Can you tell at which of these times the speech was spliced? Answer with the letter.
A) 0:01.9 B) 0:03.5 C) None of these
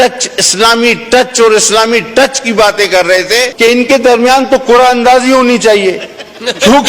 B